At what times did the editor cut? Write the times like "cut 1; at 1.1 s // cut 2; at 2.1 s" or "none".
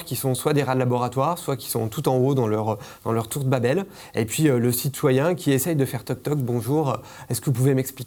none